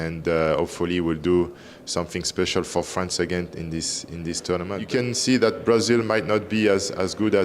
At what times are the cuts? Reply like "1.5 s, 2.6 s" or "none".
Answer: 4.7 s